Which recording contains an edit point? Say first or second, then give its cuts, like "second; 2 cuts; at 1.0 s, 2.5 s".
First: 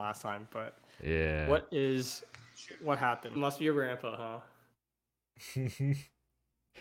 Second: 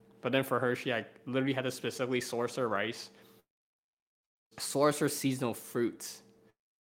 first; 1 cut; at 3.4 s